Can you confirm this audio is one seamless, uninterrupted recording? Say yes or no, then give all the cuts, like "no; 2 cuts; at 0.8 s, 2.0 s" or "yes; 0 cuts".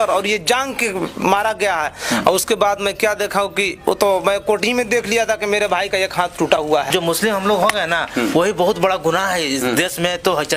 no; 1 cut; at 6.9 s